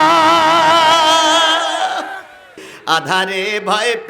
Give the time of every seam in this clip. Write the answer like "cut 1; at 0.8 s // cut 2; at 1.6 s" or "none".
cut 1; at 2.7 s